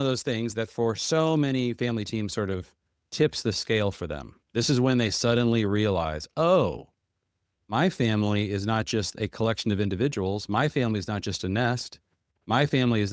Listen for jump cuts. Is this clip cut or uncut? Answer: uncut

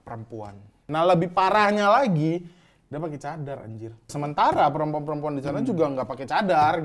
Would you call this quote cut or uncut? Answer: cut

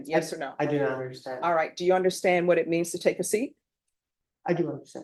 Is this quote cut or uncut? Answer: uncut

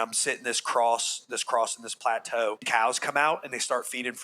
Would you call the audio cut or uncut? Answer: cut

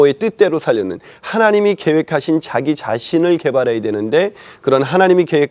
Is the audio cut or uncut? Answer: uncut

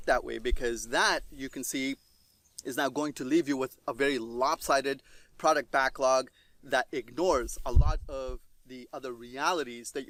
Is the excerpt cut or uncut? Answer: uncut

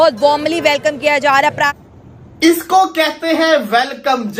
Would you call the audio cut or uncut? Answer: cut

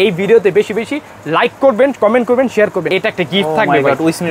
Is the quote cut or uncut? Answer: cut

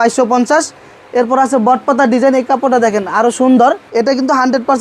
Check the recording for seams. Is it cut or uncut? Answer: cut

